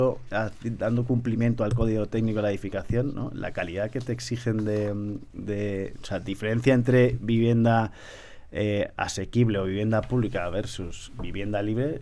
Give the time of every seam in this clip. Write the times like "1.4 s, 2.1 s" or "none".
none